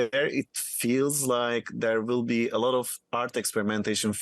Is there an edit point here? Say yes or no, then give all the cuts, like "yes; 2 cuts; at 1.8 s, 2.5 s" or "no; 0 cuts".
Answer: no; 0 cuts